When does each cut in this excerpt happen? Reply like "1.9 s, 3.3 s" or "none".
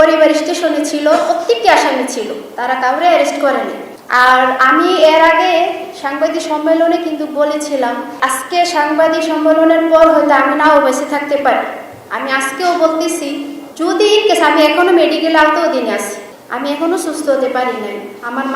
8.1 s